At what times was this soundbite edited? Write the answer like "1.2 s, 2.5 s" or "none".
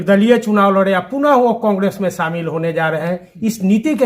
none